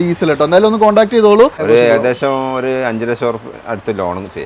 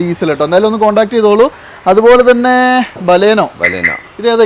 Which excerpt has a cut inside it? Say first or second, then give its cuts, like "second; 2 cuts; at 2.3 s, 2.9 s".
first; 1 cut; at 1.6 s